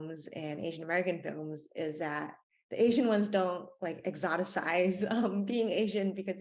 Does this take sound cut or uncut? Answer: uncut